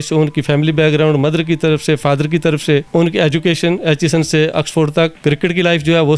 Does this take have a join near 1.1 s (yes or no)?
no